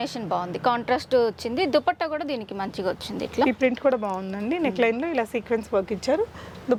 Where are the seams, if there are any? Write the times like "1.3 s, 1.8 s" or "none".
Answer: none